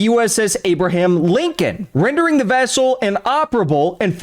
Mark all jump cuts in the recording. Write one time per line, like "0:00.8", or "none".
0:01.8